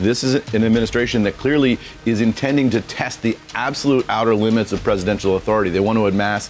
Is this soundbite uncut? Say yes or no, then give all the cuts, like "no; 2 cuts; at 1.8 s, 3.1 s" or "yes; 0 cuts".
yes; 0 cuts